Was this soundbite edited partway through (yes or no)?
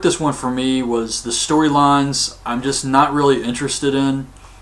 yes